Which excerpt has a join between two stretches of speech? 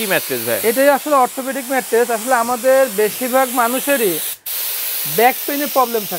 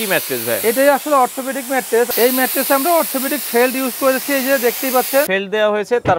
second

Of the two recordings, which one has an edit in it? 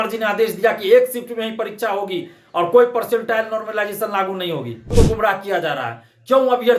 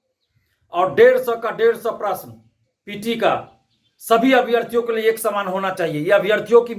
first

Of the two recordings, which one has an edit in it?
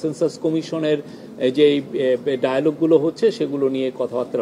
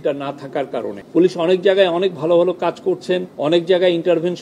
second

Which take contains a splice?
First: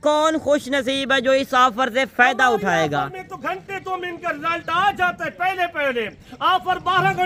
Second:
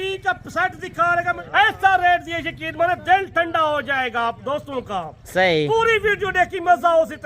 second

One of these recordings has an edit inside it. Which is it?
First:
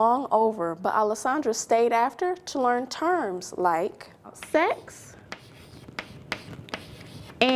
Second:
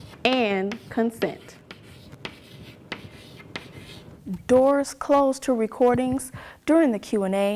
second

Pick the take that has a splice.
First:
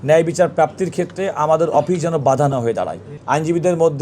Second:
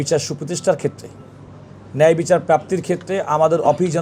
first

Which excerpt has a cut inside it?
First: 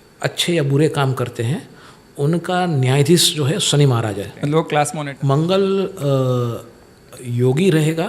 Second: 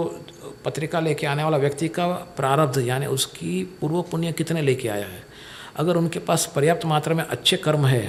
first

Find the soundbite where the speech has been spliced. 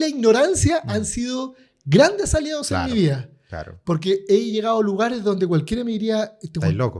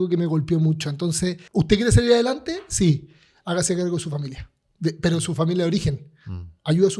second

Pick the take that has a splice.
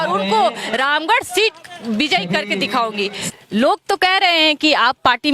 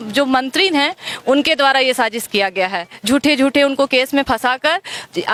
first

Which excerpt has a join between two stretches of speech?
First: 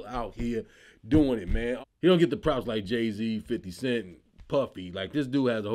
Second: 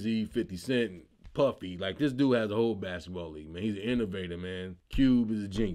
first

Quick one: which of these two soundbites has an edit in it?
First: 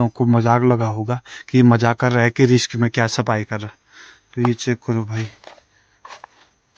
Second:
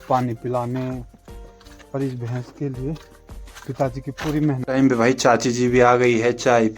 second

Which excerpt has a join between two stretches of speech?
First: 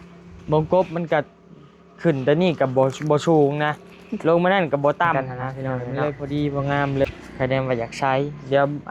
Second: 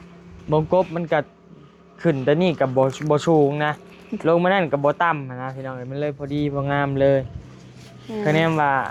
first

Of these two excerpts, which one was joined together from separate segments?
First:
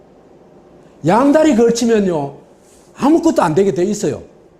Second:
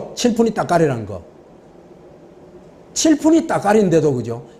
first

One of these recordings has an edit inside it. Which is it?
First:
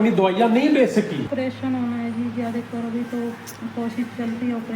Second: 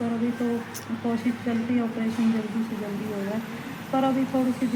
first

